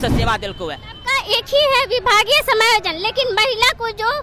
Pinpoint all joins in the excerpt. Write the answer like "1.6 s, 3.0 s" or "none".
1.0 s

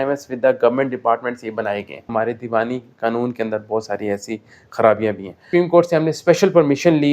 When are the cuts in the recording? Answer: 2.1 s, 5.4 s

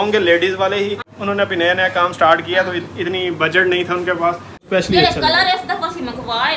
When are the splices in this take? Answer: 1.1 s, 4.7 s

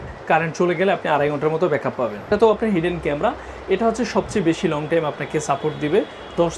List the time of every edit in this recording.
2.3 s

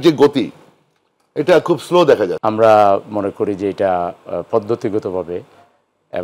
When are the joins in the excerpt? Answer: 2.4 s

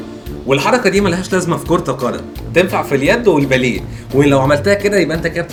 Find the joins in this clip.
none

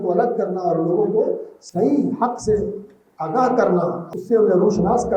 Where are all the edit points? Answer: 4.0 s

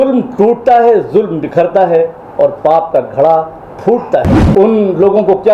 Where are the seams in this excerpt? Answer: 4.4 s

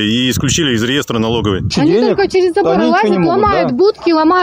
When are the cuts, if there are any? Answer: 1.7 s

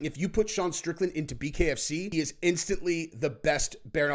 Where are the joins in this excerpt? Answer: 2.1 s

